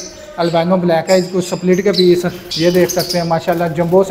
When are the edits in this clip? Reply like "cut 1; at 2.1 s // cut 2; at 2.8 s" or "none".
cut 1; at 2.4 s

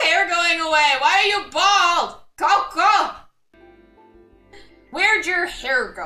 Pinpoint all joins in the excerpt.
cut 1; at 3.5 s

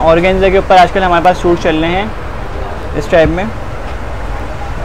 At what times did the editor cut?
none

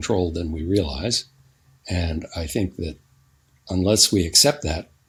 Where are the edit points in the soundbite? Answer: none

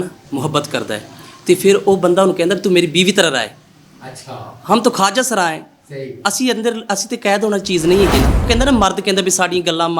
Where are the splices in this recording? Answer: cut 1; at 8.5 s

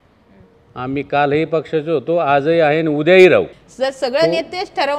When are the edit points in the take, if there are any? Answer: cut 1; at 3.6 s

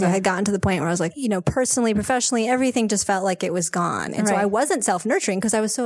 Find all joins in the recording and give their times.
cut 1; at 1.1 s

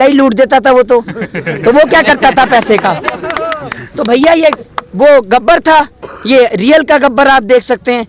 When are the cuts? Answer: none

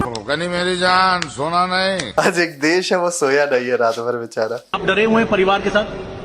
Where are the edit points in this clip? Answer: cut 1; at 2.1 s // cut 2; at 4.8 s

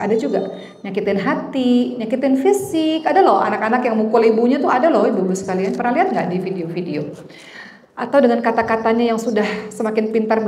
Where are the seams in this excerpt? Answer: none

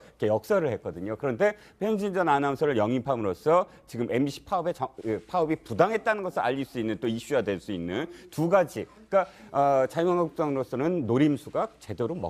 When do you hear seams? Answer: cut 1; at 8.1 s

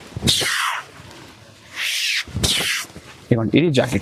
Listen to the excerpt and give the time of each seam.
none

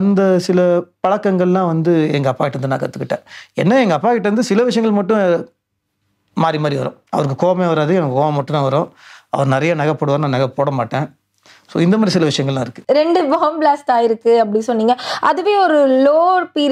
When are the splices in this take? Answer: none

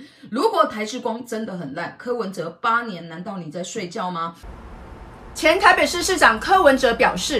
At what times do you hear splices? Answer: cut 1; at 4.5 s

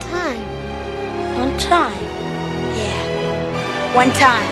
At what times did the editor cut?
none

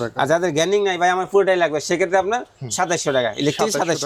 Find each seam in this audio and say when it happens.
none

